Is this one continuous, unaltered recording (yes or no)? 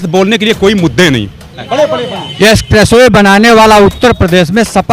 no